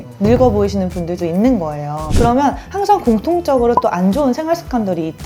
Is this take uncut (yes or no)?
no